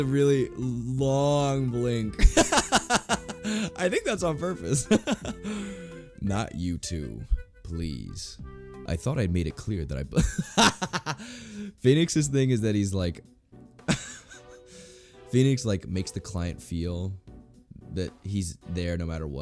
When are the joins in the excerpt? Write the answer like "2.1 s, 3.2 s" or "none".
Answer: 8.8 s